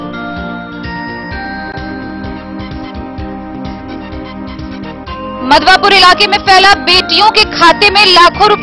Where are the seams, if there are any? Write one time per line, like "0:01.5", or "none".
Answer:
0:01.7